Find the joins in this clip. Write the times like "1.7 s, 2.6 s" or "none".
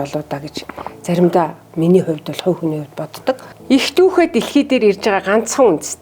3.5 s